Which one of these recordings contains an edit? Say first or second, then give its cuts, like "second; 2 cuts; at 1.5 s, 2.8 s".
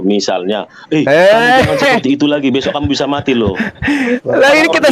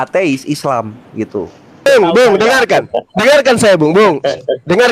second; 1 cut; at 1.9 s